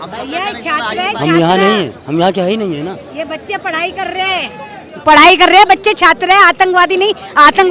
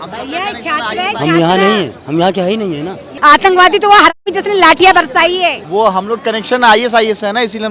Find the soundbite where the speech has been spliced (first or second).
second